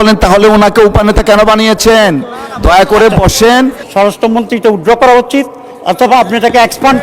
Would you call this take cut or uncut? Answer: cut